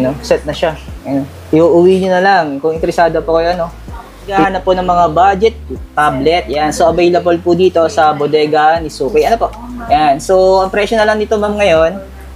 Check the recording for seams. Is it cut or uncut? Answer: cut